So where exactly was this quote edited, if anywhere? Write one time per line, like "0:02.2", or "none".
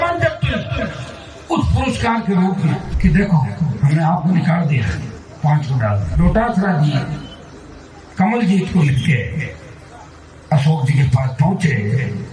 0:02.9
0:06.1